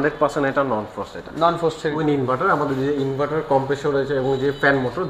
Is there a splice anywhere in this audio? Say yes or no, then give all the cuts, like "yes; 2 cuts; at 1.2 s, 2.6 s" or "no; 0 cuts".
yes; 1 cut; at 2.0 s